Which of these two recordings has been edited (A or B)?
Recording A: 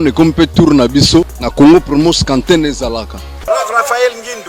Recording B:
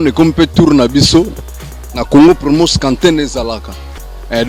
A